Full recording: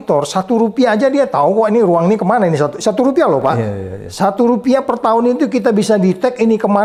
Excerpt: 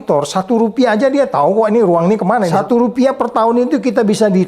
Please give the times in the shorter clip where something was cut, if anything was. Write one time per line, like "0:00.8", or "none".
0:02.5